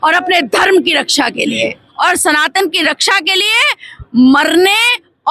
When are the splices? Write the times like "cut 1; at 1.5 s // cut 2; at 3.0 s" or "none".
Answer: cut 1; at 1.8 s

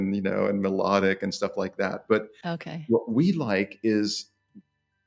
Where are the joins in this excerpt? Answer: none

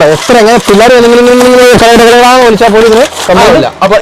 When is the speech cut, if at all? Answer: none

